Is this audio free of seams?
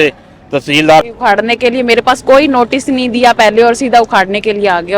no; 1 cut; at 1.1 s

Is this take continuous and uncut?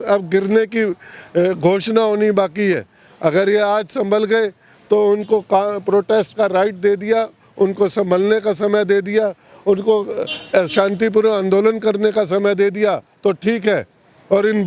yes; 0 cuts

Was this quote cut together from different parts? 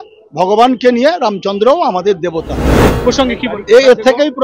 yes; 1 cut; at 2.8 s

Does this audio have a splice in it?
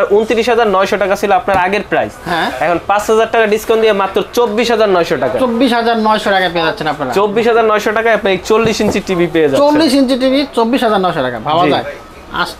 no; 0 cuts

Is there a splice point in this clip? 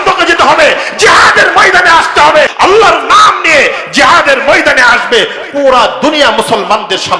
yes; 1 cut; at 2.5 s

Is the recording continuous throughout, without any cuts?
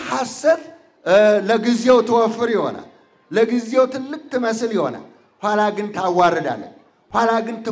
yes; 0 cuts

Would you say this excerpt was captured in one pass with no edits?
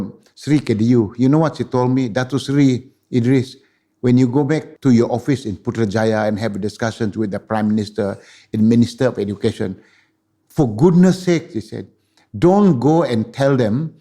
no; 1 cut; at 4.7 s

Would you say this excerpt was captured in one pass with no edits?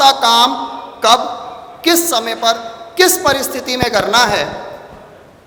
yes; 0 cuts

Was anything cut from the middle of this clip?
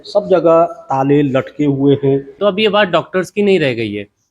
yes; 1 cut; at 2.3 s

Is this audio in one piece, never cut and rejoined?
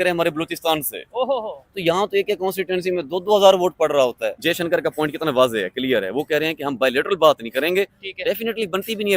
no; 1 cut; at 4.4 s

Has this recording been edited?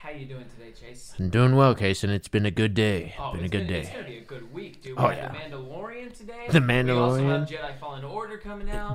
no; 0 cuts

